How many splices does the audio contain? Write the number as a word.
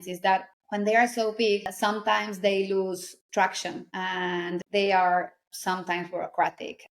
two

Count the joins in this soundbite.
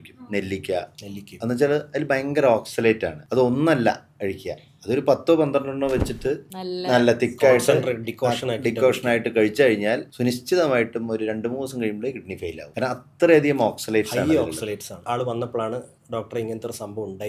one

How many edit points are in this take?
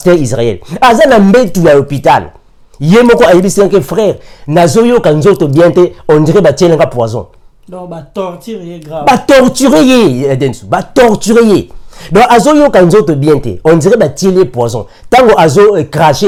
zero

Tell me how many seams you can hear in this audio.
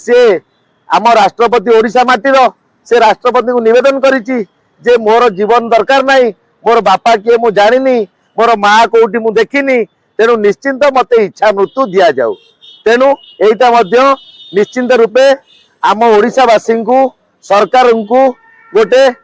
zero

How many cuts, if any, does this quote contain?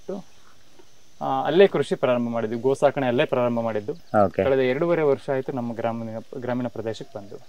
zero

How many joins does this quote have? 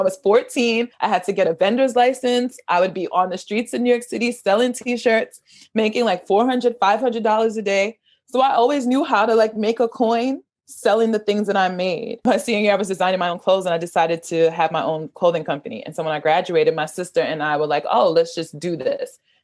one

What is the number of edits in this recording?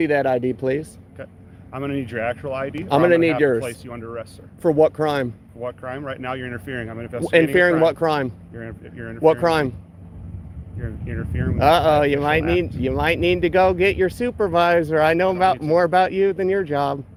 zero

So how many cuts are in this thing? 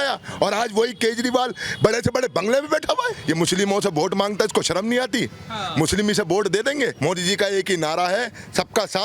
two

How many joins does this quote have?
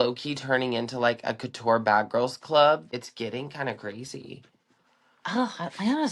one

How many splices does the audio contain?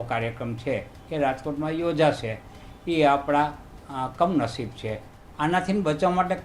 one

